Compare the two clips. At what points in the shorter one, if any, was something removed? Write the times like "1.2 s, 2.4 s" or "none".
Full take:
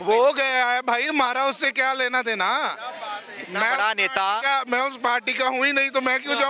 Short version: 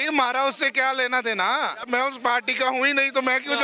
1.9 s